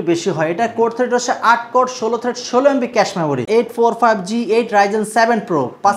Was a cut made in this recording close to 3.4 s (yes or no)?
yes